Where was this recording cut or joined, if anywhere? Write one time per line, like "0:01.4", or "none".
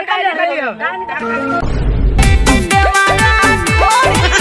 0:01.2